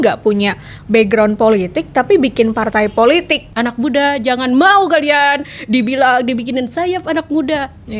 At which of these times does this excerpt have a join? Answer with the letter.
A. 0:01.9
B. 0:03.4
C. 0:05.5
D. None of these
B